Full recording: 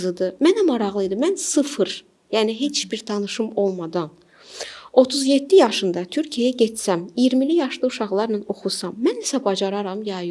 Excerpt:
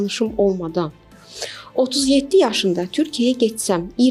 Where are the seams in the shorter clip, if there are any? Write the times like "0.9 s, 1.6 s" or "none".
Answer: none